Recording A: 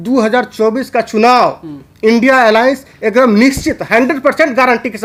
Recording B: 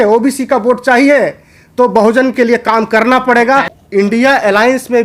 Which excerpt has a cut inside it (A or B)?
B